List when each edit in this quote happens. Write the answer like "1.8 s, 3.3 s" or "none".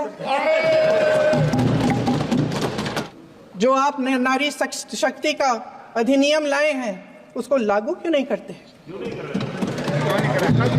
3.1 s